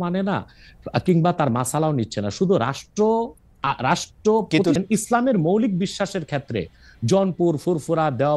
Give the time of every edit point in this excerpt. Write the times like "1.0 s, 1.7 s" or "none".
4.8 s